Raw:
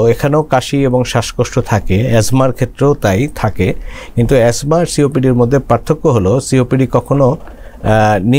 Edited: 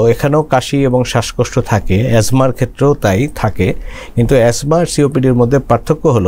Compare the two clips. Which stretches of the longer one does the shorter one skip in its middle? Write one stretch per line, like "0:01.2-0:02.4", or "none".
none